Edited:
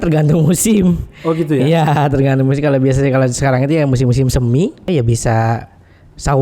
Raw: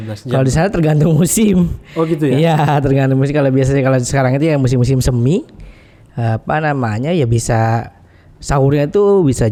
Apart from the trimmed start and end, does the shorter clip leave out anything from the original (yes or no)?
yes